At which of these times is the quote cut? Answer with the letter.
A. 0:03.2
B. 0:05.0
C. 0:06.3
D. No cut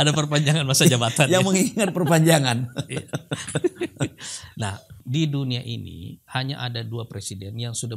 B